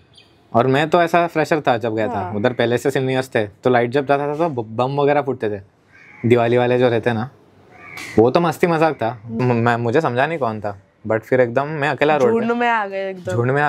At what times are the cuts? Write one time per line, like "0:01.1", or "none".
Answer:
0:09.4

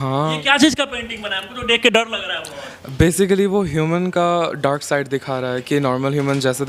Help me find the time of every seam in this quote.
none

